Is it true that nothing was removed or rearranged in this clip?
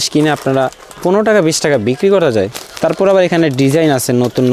yes; 0 cuts

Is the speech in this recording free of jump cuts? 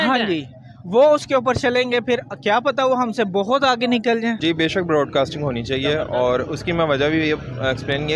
no; 1 cut; at 4.4 s

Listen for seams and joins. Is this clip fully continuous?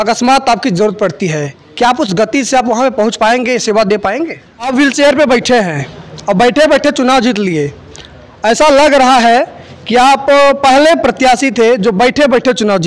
no; 1 cut; at 4.7 s

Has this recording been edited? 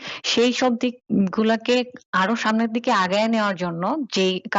no; 0 cuts

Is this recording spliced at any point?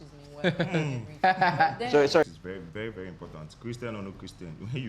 yes; 1 cut; at 2.2 s

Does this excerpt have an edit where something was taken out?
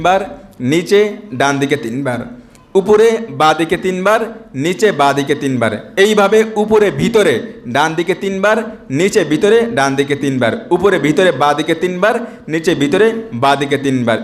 no; 0 cuts

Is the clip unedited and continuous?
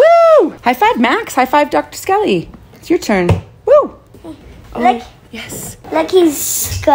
yes; 0 cuts

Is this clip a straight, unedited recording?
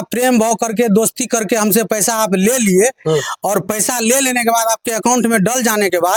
yes; 0 cuts

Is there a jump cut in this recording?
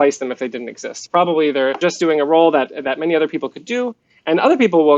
yes; 1 cut; at 1.8 s

